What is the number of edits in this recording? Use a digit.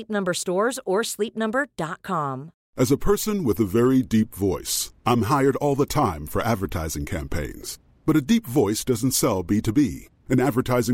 1